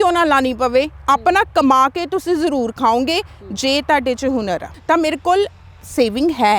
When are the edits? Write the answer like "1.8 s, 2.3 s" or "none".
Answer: 4.7 s